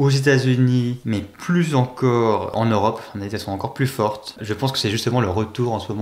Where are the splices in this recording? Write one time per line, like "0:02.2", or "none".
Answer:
0:01.0
0:02.5
0:04.4